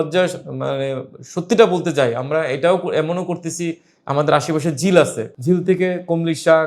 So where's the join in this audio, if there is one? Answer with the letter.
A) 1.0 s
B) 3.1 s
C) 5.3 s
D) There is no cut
C